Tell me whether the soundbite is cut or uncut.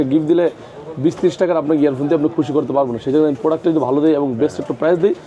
uncut